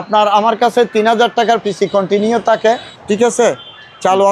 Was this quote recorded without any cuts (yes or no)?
no